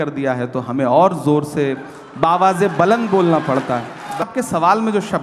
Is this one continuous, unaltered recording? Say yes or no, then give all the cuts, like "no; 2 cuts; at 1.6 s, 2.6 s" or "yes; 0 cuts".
no; 1 cut; at 4.2 s